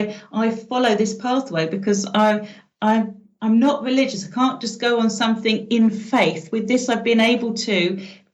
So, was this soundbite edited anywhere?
no; 0 cuts

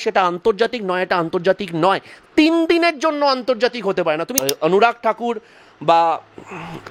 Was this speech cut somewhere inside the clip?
yes; 1 cut; at 4.3 s

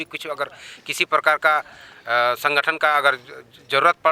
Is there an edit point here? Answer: no; 0 cuts

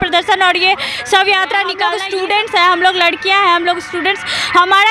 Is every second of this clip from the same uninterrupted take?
no; 1 cut; at 1.9 s

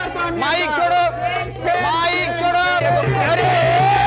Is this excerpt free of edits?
no; 1 cut; at 2.8 s

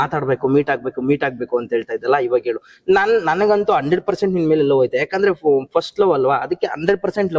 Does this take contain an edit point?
no; 0 cuts

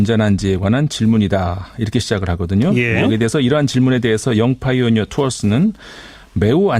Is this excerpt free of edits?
no; 1 cut; at 5.1 s

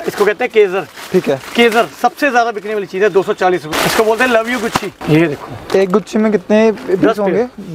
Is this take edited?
yes; 2 cuts; at 3.7 s, 4.9 s

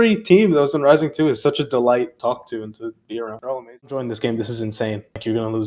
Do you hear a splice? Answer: yes; 1 cut; at 3.8 s

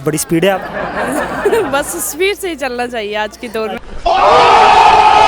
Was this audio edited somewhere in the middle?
no; 0 cuts

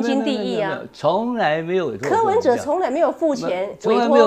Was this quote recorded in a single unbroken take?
yes; 0 cuts

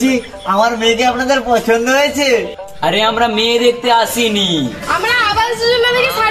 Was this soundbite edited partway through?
no; 0 cuts

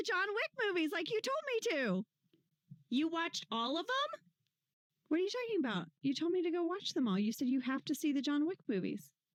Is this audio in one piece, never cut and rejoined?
yes; 0 cuts

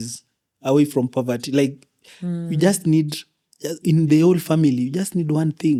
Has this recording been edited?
no; 0 cuts

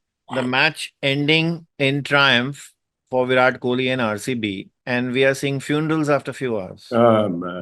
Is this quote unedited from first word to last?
no; 2 cuts; at 1.7 s, 4.7 s

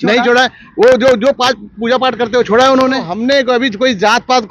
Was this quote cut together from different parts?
yes; 1 cut; at 3.1 s

